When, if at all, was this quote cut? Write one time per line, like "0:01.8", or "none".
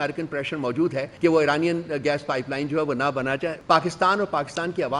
0:01.1
0:03.6